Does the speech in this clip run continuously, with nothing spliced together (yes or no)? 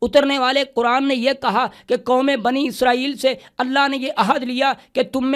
yes